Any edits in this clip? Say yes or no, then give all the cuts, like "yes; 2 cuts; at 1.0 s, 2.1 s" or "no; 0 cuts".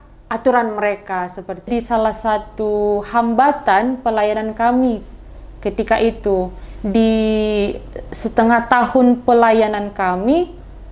yes; 1 cut; at 1.7 s